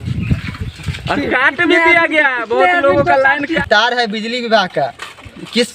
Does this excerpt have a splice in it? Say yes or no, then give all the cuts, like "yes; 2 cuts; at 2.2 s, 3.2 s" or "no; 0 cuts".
yes; 1 cut; at 3.6 s